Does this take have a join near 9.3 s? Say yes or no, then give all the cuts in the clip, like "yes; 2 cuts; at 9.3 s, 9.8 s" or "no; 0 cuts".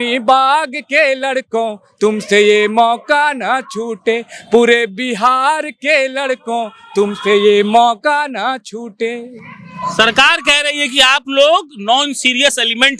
no; 0 cuts